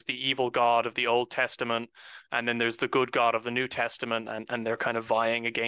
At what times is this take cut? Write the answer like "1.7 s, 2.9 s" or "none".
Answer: none